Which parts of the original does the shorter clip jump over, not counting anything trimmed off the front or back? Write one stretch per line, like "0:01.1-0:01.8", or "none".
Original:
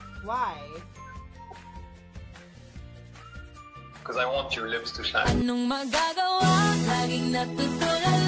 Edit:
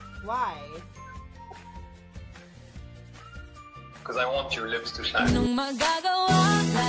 0:05.4-0:05.5